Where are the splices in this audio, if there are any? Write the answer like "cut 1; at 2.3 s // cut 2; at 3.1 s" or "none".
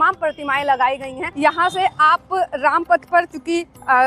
cut 1; at 1.2 s